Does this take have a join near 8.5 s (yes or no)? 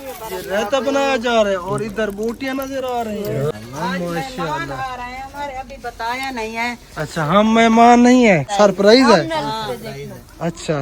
yes